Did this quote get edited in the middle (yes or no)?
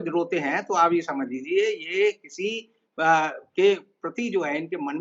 no